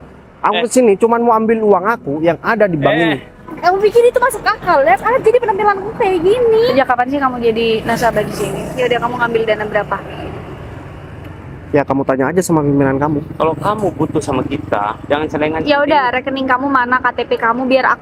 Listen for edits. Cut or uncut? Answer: uncut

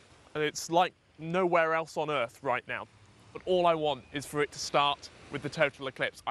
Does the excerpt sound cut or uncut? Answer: cut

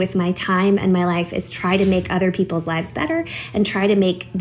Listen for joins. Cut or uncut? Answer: uncut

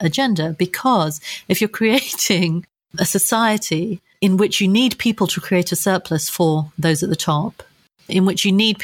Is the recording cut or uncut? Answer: uncut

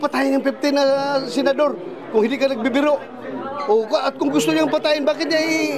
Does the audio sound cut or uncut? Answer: cut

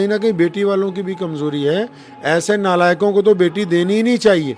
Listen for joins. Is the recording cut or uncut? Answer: uncut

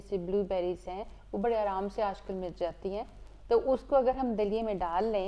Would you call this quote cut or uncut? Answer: uncut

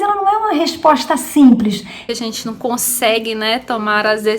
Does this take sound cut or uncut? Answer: cut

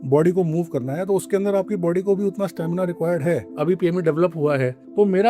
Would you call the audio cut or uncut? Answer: cut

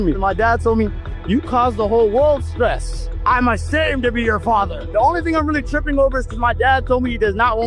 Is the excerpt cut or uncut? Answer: uncut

